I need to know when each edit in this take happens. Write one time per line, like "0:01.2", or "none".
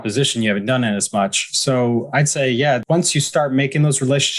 0:02.8